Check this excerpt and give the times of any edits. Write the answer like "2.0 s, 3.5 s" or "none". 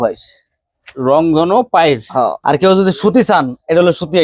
2.4 s